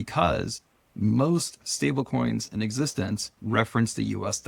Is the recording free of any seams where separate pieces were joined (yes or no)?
no